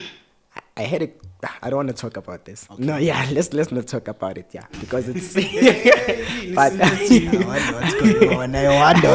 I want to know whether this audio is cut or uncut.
uncut